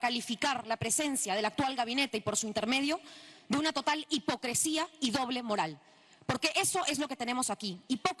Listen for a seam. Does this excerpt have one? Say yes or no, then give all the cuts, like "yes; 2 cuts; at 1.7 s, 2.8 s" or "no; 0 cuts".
no; 0 cuts